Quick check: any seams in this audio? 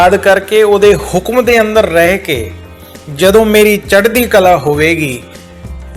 no; 0 cuts

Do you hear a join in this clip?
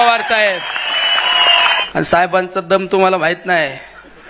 yes; 1 cut; at 1.8 s

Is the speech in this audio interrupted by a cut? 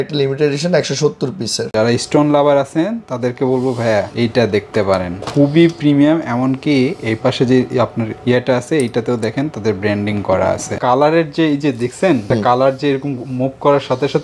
yes; 2 cuts; at 1.6 s, 10.7 s

